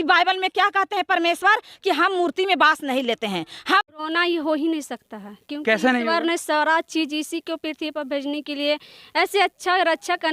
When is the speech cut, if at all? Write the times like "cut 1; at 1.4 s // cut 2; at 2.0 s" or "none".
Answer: cut 1; at 3.9 s